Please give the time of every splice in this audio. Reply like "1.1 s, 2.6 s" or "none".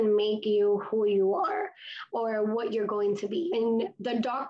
3.5 s